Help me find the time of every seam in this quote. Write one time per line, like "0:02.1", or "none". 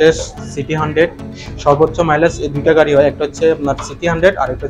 none

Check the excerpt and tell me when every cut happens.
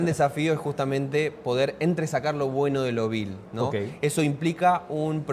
none

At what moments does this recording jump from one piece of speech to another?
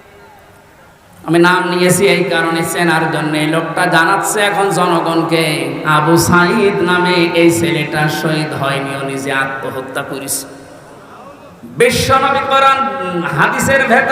0:11.2

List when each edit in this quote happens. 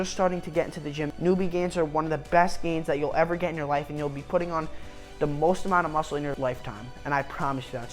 0:01.1

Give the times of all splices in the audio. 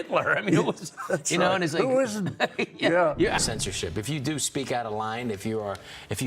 0:03.5

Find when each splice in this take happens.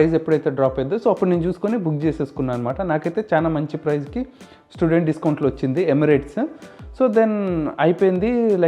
none

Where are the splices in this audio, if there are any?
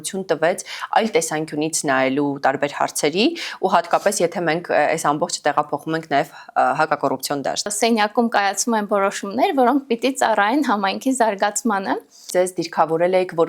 0:07.7
0:12.2

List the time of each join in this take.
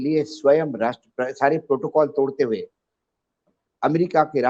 none

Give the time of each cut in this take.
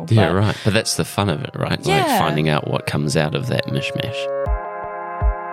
0:04.0

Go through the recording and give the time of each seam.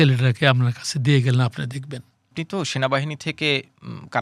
0:02.4

